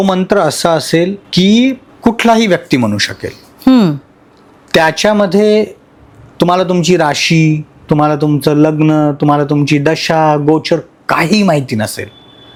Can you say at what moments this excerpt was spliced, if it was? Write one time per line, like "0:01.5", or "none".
none